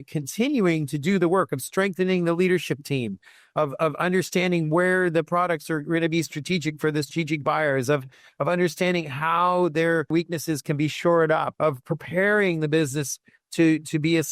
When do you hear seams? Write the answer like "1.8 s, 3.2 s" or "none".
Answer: none